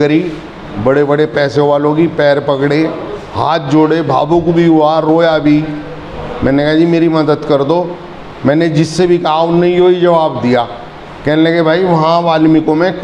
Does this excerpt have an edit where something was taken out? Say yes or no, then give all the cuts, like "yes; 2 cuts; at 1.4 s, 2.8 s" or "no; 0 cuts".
no; 0 cuts